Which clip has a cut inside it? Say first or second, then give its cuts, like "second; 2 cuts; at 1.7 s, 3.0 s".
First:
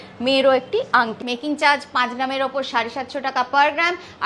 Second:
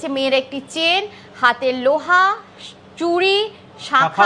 first; 1 cut; at 1.2 s